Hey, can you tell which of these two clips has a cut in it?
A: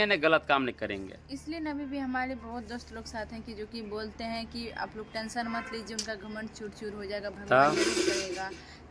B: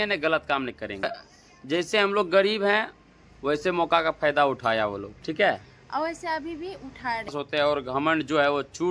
B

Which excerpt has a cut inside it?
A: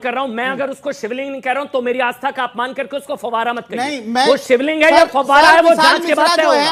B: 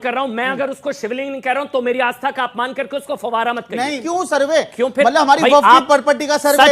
B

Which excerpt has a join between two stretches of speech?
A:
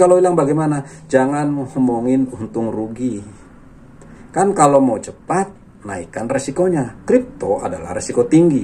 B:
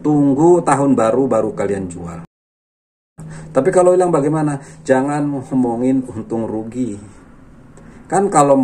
B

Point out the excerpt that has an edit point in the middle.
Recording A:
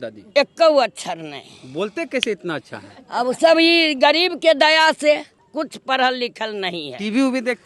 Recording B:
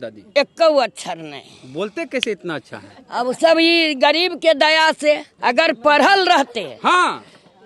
B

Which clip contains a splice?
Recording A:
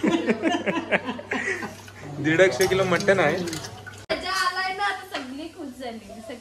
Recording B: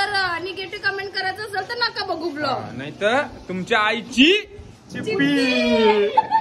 A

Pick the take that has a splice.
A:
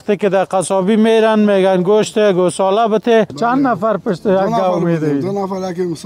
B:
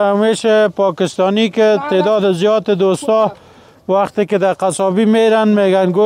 A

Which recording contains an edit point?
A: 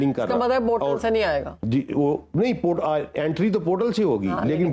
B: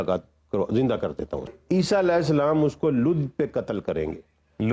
B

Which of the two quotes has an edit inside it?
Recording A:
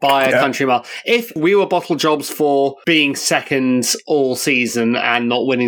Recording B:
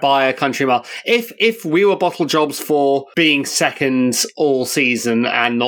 A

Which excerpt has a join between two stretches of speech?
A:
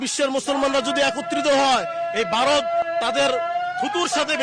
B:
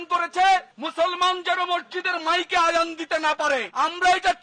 A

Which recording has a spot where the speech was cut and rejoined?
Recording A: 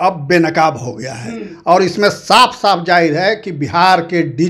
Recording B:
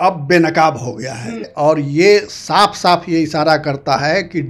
B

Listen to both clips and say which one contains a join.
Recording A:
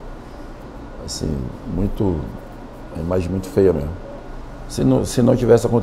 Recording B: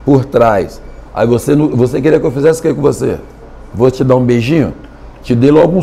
A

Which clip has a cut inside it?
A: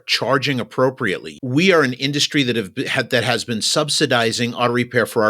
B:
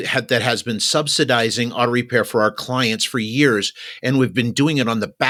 A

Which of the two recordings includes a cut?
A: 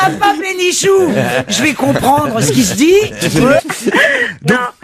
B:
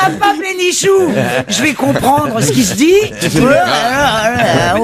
B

